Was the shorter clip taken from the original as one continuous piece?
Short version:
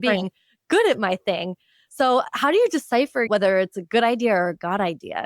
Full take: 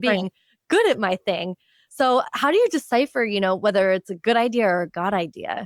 no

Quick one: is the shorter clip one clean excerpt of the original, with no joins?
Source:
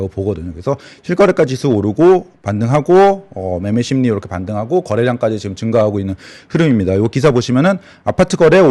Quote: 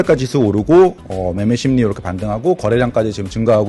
no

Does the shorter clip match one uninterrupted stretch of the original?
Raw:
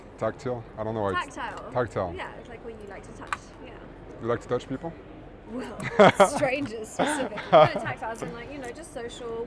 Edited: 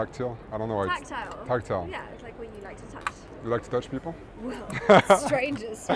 no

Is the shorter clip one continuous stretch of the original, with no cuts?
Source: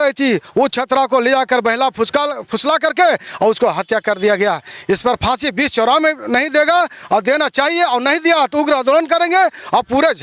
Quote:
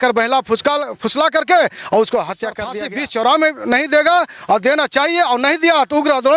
no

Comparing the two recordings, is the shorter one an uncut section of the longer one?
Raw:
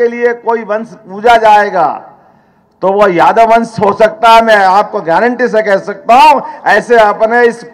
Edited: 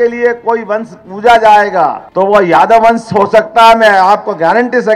no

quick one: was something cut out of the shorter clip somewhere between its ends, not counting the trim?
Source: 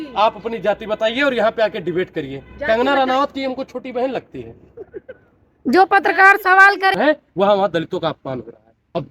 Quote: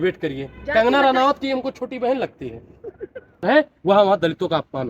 yes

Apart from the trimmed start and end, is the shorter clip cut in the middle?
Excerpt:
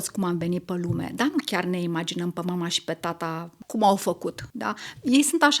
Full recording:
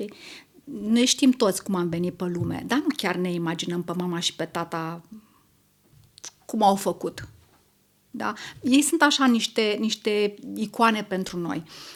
yes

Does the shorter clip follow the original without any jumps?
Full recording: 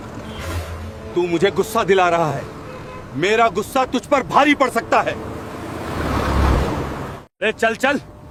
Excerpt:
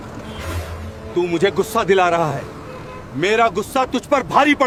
yes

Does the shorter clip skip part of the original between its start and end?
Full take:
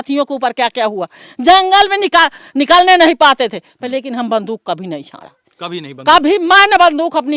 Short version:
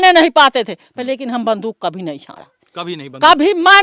no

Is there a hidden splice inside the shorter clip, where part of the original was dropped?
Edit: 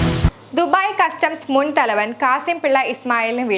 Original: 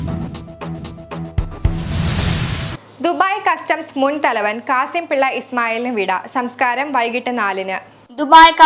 no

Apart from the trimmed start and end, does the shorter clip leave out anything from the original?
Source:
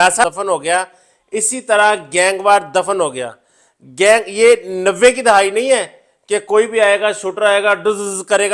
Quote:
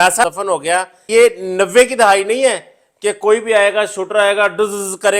yes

